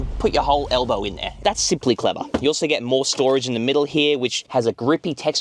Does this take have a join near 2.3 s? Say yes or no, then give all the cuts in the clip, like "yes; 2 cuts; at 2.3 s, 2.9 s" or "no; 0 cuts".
no; 0 cuts